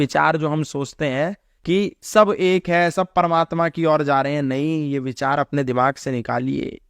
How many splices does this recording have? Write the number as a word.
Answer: one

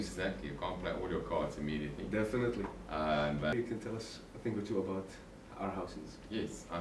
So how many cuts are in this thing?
one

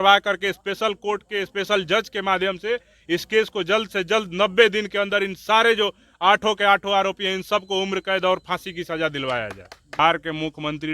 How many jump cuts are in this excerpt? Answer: one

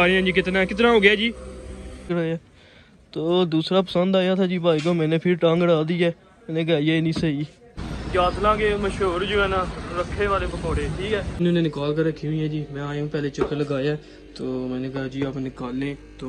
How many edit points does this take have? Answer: three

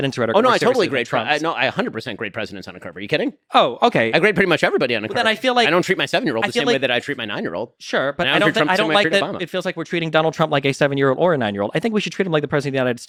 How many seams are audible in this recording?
zero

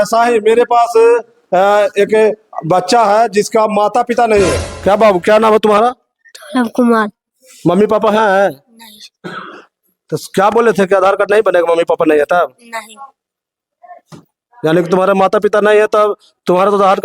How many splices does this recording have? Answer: one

